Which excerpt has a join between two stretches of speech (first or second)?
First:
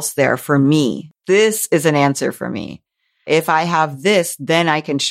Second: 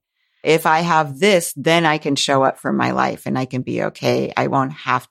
first